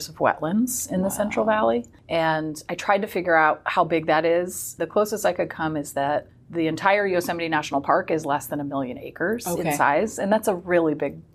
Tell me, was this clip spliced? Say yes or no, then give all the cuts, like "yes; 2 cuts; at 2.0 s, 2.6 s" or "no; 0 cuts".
no; 0 cuts